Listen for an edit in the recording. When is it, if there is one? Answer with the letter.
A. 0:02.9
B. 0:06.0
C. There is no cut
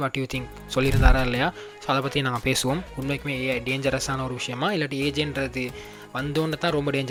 C